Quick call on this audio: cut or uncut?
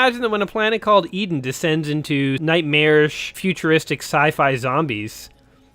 cut